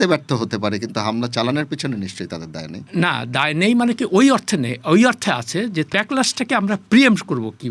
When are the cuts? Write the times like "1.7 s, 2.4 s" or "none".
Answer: 5.9 s